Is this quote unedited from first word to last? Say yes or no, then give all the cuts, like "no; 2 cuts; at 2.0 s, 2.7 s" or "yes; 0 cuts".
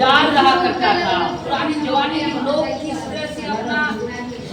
yes; 0 cuts